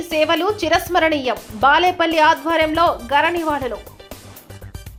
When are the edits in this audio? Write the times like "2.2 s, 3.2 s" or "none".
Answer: none